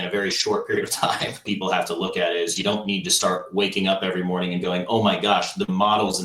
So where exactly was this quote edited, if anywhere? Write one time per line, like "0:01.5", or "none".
0:01.4